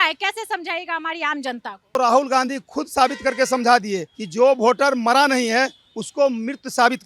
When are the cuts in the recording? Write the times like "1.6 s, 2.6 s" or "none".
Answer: 2.0 s